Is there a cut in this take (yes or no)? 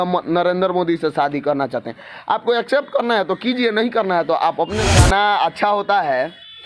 yes